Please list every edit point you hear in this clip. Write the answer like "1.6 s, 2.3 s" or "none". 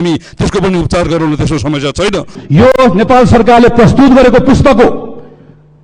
2.4 s